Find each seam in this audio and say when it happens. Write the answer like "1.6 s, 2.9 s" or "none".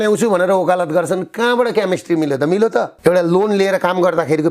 2.9 s